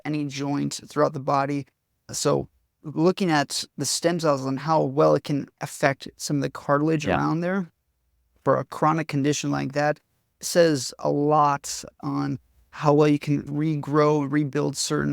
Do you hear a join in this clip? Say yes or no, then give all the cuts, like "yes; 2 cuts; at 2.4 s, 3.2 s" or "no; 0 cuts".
yes; 2 cuts; at 5.6 s, 12.0 s